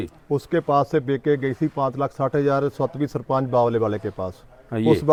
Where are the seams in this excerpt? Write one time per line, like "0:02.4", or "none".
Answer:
none